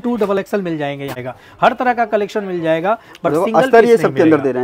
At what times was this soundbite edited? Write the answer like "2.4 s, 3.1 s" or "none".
1.3 s